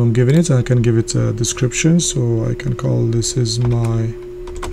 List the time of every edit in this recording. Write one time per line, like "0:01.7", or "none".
none